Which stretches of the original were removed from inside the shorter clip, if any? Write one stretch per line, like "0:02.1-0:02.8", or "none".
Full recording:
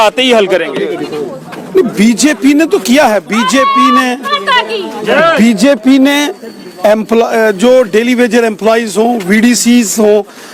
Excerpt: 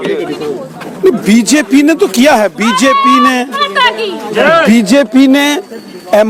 none